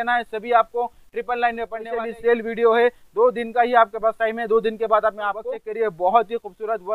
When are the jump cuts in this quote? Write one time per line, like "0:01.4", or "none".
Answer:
0:01.8
0:05.6